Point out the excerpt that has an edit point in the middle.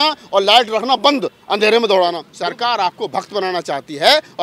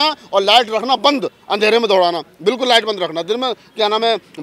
first; 1 cut; at 2.3 s

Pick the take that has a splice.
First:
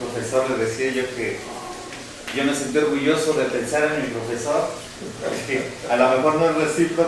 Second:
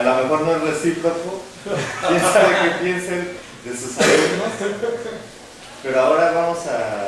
first; 1 cut; at 1.9 s

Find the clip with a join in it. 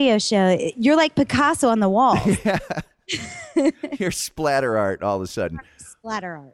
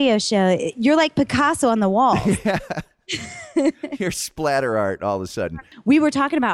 second; 1 cut; at 5.6 s

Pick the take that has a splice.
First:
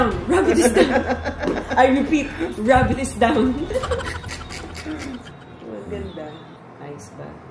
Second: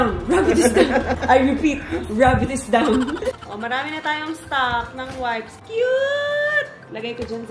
second; 3 cuts; at 1.2 s, 3.4 s, 5.5 s

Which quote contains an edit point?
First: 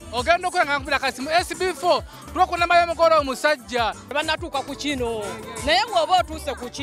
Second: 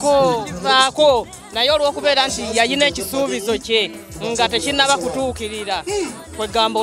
first; 1 cut; at 4.1 s

